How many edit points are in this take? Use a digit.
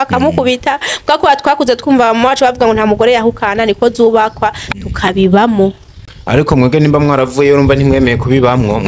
0